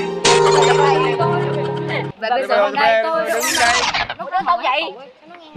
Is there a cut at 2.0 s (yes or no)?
yes